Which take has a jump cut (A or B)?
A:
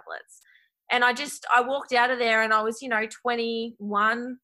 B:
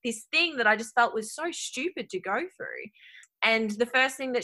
B